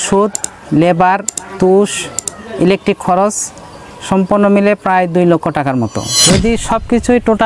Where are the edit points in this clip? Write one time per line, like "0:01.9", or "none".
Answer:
0:06.2